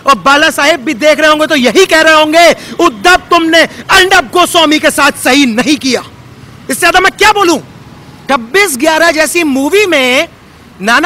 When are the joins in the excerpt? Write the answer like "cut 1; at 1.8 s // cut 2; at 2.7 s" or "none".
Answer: cut 1; at 8.1 s